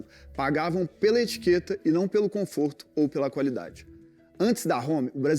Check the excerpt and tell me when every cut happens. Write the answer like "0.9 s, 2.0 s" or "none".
4.4 s